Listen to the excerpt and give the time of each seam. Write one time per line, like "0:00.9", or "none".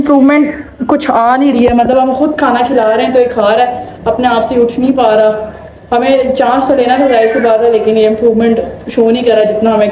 none